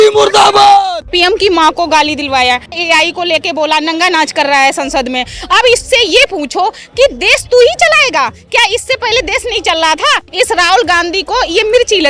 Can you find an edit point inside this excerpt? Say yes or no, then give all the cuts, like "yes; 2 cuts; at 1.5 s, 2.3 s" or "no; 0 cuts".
yes; 3 cuts; at 1.0 s, 2.8 s, 10.2 s